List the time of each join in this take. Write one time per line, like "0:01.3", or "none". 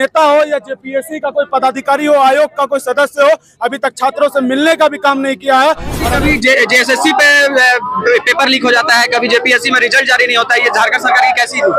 0:06.1